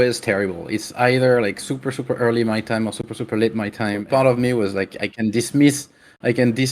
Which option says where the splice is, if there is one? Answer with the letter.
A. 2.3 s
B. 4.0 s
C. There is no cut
B